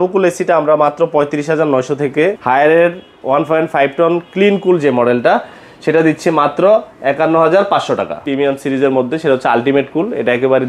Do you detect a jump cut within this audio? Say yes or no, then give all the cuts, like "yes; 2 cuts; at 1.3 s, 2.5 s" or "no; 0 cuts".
yes; 2 cuts; at 2.4 s, 8.2 s